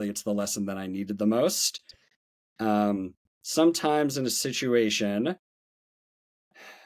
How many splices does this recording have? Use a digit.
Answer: 0